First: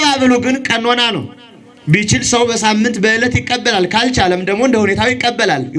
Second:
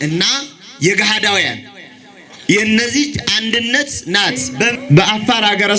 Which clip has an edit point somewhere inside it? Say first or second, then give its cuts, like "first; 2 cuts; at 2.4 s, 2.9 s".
second; 1 cut; at 4.7 s